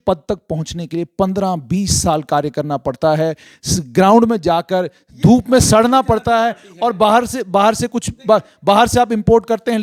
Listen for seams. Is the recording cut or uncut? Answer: uncut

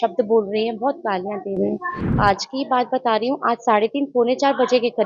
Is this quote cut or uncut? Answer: uncut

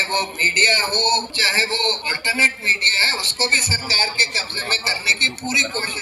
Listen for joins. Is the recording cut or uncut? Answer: cut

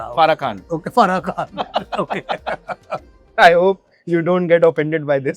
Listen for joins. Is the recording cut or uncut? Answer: uncut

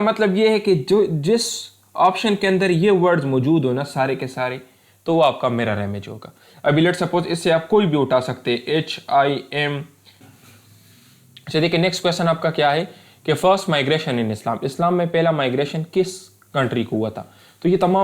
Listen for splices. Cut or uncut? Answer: cut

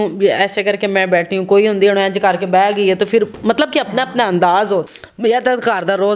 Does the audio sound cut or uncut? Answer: cut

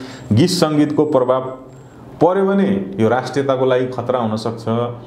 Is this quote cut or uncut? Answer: uncut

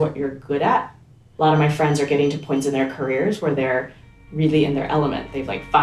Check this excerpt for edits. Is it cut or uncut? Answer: cut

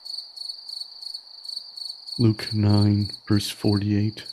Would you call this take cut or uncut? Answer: cut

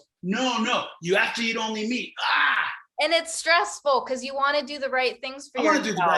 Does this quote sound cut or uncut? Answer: uncut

